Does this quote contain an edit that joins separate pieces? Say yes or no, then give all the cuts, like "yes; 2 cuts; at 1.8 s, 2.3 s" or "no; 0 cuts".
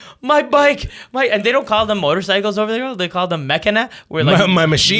no; 0 cuts